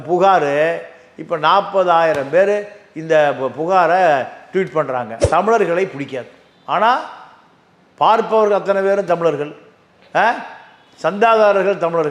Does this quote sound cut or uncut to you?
cut